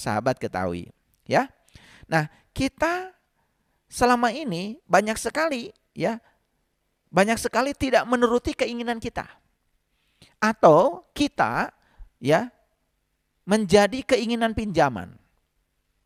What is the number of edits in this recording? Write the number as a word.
zero